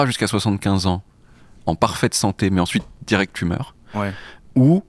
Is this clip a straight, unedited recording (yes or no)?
yes